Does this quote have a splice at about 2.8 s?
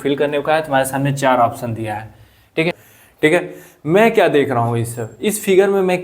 yes; 1 cut; at 2.8 s

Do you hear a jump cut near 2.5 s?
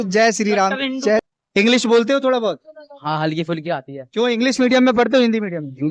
no; 1 cut; at 1.3 s

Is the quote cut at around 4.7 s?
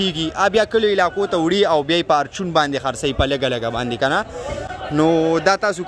no; 0 cuts

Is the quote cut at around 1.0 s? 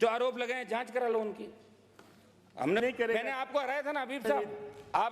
no; 1 cut; at 2.8 s

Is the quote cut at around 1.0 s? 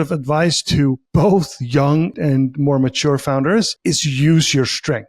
yes; 3 cuts; at 1.0 s, 2.2 s, 3.7 s

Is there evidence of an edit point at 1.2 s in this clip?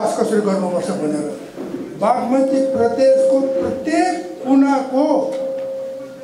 yes; 1 cut; at 1.2 s

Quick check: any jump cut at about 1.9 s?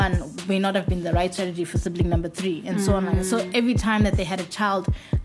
no; 0 cuts

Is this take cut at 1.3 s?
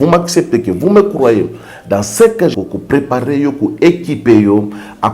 no; 1 cut; at 2.5 s

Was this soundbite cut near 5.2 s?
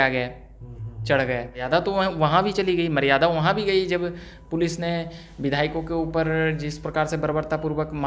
no; 1 cut; at 1.6 s

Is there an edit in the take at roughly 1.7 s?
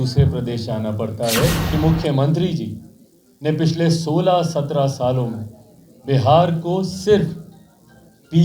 yes; 1 cut; at 1.7 s

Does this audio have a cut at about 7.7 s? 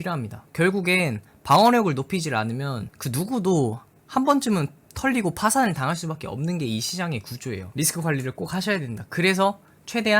yes; 1 cut; at 7.7 s

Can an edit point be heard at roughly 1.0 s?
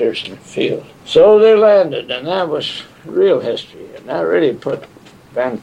yes; 1 cut; at 1.0 s

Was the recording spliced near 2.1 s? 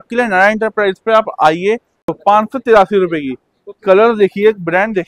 yes; 1 cut; at 2.1 s

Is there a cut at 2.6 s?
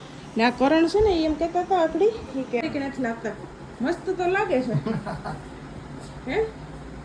yes; 1 cut; at 2.6 s

